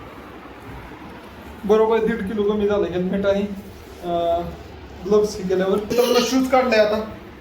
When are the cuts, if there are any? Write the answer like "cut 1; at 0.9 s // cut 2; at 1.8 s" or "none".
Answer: cut 1; at 5.9 s